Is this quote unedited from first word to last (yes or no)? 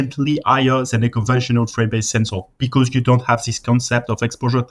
yes